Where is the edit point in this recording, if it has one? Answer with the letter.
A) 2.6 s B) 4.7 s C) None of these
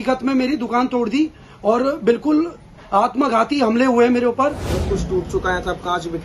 B